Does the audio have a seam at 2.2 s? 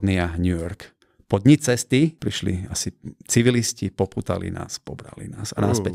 yes; 1 cut; at 2.2 s

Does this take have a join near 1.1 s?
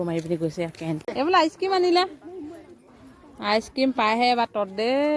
yes; 1 cut; at 1.1 s

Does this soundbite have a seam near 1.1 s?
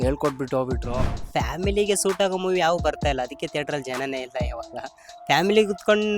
yes; 1 cut; at 1.1 s

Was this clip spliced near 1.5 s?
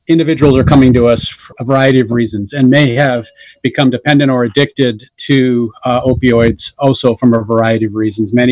no; 0 cuts

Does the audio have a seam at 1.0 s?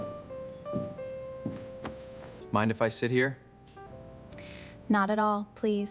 no; 2 cuts; at 2.4 s, 3.8 s

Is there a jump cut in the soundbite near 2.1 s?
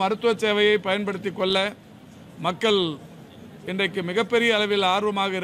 no; 0 cuts

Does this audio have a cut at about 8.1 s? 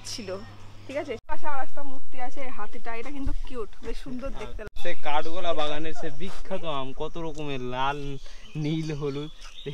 no; 2 cuts; at 1.2 s, 4.6 s

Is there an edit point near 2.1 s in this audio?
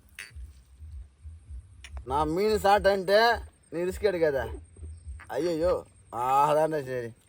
yes; 1 cut; at 2.1 s

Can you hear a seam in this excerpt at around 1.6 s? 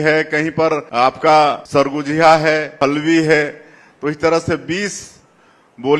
yes; 3 cuts; at 0.9 s, 1.6 s, 2.8 s

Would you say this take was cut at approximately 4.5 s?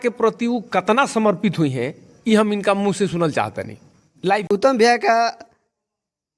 yes; 1 cut; at 4.5 s

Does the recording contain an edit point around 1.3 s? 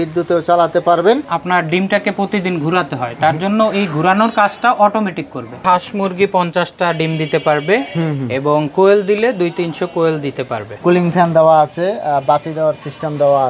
yes; 3 cuts; at 1.3 s, 5.6 s, 10.8 s

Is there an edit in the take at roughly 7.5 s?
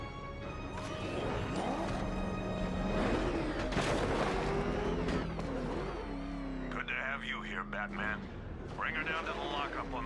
yes; 1 cut; at 7.5 s

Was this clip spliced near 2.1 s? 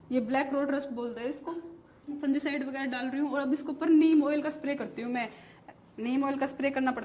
yes; 1 cut; at 2.1 s

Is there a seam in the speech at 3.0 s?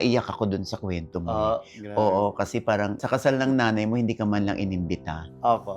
yes; 1 cut; at 3.0 s

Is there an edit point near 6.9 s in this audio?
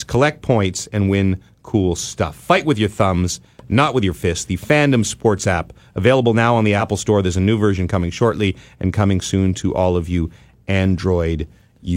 yes; 1 cut; at 6.9 s

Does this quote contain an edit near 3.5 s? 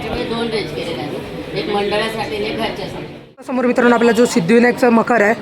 yes; 1 cut; at 3.5 s

